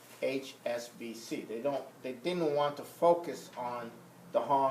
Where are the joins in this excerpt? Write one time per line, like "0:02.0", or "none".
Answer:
0:03.2